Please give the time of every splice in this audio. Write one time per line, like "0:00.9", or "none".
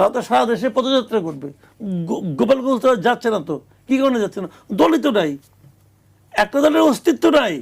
none